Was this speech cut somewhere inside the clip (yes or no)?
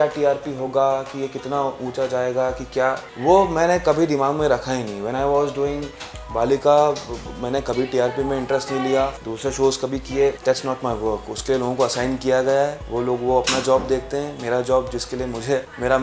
no